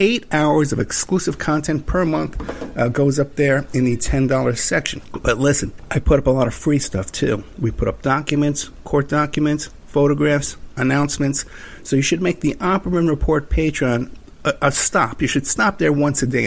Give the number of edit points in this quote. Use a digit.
2